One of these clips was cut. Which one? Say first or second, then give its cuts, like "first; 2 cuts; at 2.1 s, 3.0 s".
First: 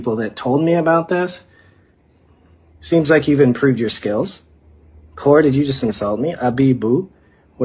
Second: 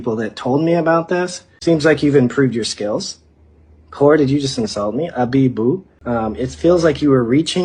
second; 2 cuts; at 1.4 s, 5.9 s